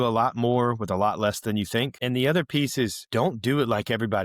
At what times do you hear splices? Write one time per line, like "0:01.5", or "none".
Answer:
0:01.9
0:03.0